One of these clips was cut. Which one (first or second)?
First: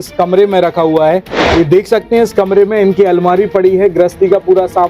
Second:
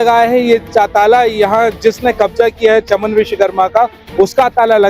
first